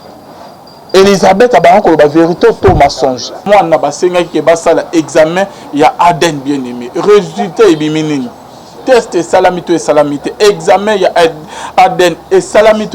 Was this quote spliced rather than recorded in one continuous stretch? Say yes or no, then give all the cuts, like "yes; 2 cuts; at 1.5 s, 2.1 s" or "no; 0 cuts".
yes; 2 cuts; at 3.4 s, 8.7 s